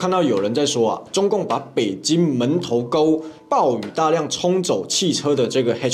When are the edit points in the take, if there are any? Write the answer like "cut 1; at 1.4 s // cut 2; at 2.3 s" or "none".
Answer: none